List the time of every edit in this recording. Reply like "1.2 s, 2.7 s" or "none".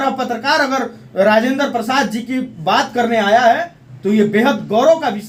none